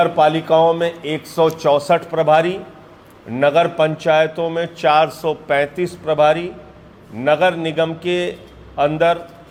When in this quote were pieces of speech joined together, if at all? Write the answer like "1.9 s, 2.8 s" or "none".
none